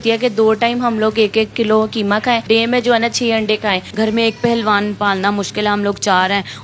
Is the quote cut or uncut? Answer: cut